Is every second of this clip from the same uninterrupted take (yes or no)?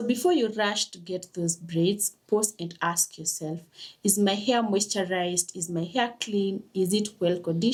yes